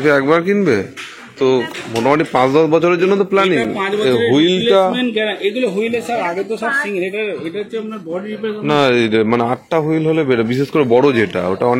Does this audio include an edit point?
no; 0 cuts

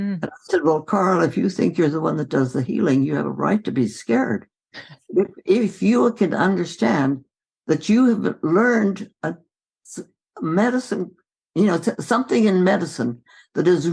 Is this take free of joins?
yes; 0 cuts

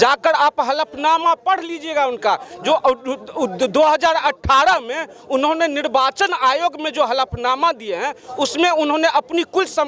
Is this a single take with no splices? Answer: yes; 0 cuts

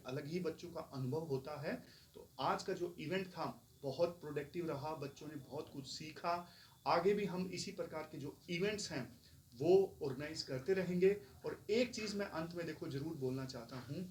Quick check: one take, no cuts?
yes; 0 cuts

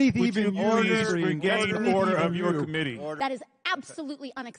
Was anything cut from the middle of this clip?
yes; 1 cut; at 3.1 s

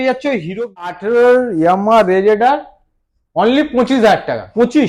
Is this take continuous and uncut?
no; 1 cut; at 0.9 s

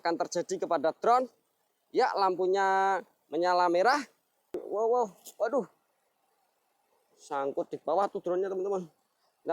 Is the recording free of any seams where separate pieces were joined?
no; 1 cut; at 4.6 s

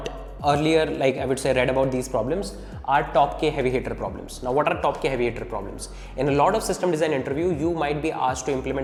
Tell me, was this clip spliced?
no; 0 cuts

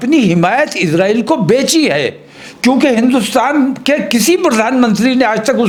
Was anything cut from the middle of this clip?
no; 0 cuts

